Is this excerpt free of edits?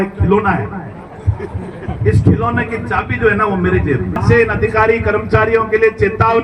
no; 1 cut; at 4.2 s

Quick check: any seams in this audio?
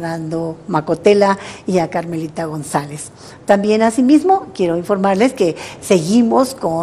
yes; 1 cut; at 3.6 s

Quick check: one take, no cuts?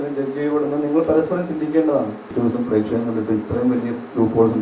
no; 1 cut; at 2.2 s

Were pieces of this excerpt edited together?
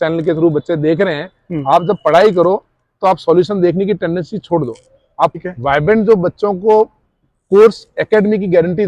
yes; 1 cut; at 5.4 s

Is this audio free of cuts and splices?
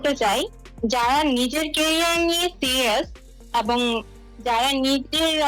yes; 0 cuts

